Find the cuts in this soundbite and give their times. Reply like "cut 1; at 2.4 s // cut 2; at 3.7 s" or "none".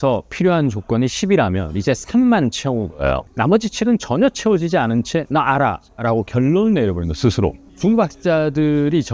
none